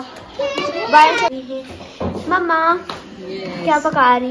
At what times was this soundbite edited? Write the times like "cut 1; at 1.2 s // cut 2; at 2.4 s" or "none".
cut 1; at 1.3 s